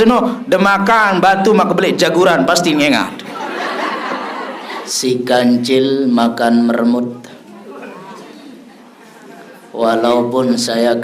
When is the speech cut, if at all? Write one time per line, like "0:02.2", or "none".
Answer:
0:04.6